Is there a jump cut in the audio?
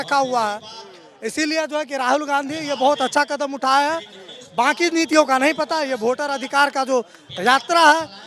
no; 0 cuts

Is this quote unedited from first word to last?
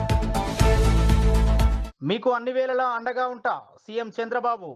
yes; 0 cuts

